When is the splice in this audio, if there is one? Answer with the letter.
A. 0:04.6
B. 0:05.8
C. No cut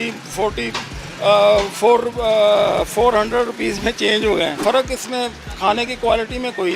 A